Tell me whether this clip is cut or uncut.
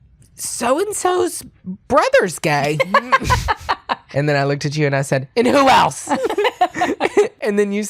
cut